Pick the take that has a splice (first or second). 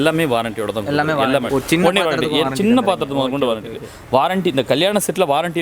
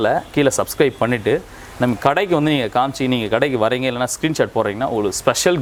first